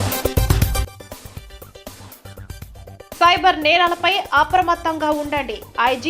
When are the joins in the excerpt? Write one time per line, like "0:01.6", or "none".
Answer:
0:00.9
0:02.0